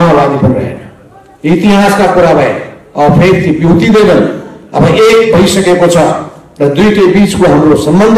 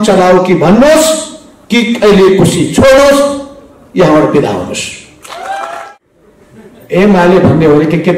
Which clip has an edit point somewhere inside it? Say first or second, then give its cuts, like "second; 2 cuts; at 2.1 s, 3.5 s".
second; 1 cut; at 5.8 s